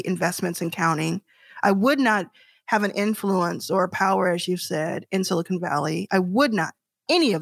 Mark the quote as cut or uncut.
uncut